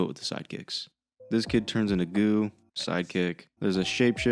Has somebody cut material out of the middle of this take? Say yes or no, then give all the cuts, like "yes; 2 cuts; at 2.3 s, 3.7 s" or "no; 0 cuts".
no; 0 cuts